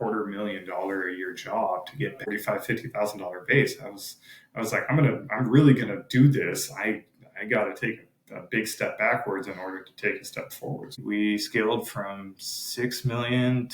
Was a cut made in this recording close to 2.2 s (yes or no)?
yes